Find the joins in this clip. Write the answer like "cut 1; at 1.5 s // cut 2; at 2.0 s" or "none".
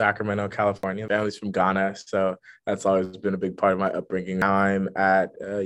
cut 1; at 1.0 s // cut 2; at 4.4 s